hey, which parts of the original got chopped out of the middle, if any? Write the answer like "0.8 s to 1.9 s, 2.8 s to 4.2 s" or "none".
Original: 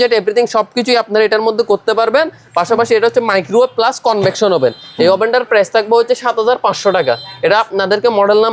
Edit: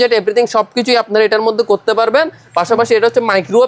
none